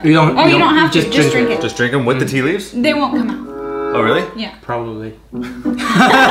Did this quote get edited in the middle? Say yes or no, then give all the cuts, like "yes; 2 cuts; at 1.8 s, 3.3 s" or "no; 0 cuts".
no; 0 cuts